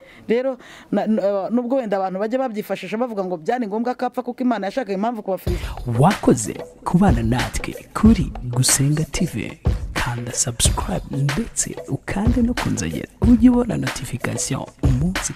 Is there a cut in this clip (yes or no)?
yes